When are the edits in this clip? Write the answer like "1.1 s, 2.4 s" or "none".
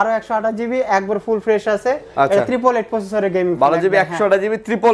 none